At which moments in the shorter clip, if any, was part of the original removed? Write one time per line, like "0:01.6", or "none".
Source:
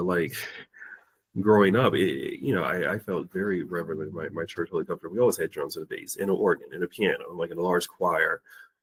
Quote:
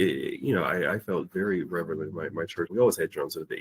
0:02.7